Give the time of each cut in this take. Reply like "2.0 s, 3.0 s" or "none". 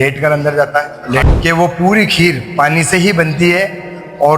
1.2 s